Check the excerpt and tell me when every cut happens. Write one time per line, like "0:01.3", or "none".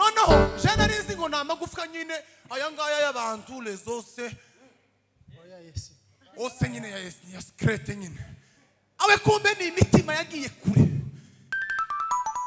none

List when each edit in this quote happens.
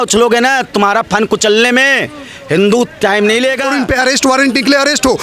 0:03.8

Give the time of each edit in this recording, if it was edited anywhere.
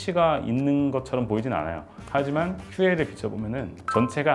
0:01.9

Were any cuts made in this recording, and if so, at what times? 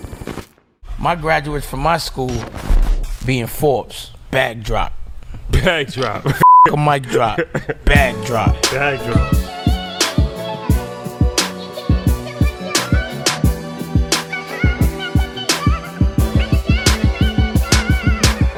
none

